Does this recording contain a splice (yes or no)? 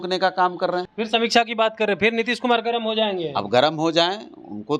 yes